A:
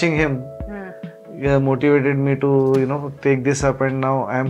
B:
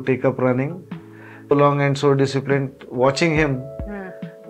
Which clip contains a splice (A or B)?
B